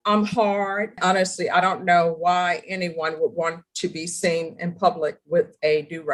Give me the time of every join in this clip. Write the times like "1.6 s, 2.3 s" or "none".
1.0 s

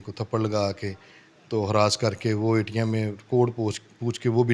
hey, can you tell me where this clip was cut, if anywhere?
none

